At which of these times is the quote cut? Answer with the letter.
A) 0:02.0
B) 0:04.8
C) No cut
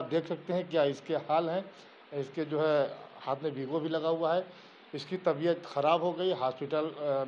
C